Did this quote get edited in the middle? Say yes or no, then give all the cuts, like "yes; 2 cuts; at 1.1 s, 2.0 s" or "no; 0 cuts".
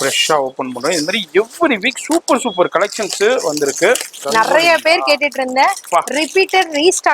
yes; 1 cut; at 4.1 s